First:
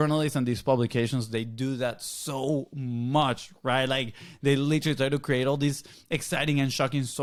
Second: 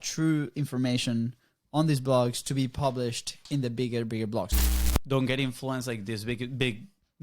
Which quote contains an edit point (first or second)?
second